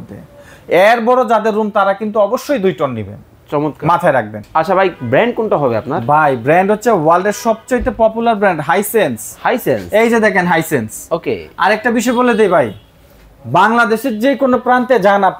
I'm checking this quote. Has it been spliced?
yes; 1 cut; at 4.4 s

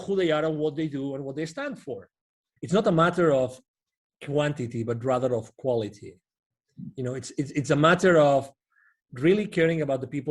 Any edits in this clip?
yes; 1 cut; at 2.5 s

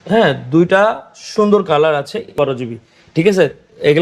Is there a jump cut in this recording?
yes; 1 cut; at 2.4 s

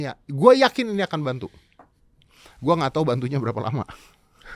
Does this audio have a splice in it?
no; 0 cuts

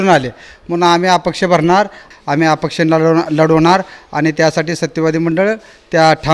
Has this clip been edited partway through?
yes; 1 cut; at 2.1 s

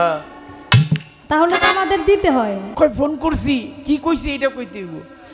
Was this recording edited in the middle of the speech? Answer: yes; 1 cut; at 2.6 s

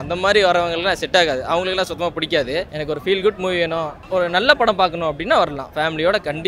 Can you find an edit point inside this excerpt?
no; 0 cuts

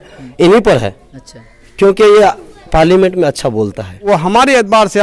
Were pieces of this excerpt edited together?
yes; 1 cut; at 4.0 s

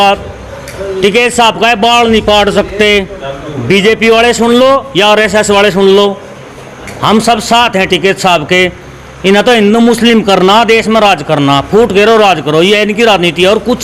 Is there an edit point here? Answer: no; 0 cuts

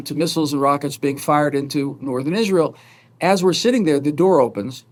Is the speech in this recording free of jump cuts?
yes; 0 cuts

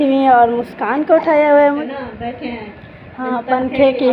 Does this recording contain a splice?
yes; 1 cut; at 1.9 s

